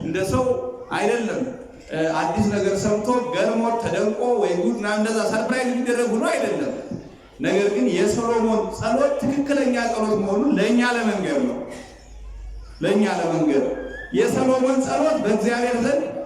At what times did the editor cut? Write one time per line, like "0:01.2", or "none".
none